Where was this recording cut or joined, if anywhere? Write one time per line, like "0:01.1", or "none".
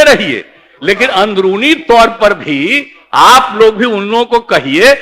none